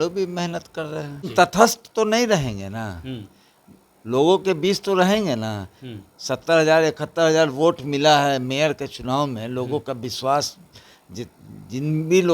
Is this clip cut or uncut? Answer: cut